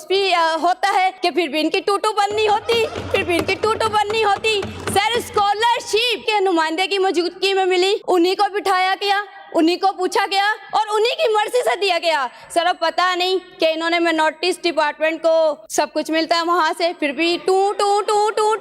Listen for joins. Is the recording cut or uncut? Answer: cut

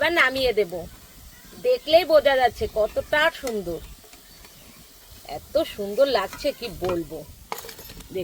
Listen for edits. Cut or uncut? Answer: uncut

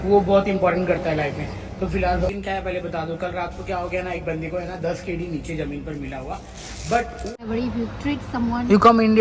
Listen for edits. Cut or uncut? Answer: cut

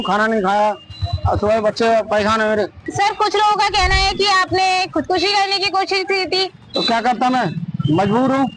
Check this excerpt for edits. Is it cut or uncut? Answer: cut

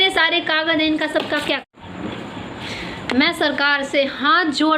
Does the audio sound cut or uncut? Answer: cut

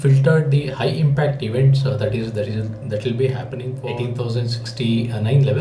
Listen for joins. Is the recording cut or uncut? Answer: cut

